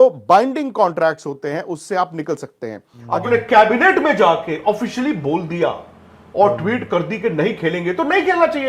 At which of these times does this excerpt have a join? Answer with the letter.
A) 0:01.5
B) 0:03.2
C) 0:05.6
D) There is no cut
B